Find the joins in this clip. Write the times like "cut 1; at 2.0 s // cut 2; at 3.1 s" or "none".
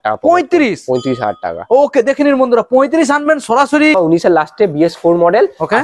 cut 1; at 4.0 s

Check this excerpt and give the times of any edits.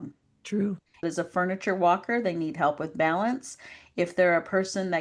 cut 1; at 1.0 s

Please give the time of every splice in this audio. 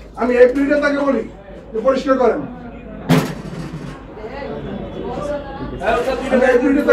none

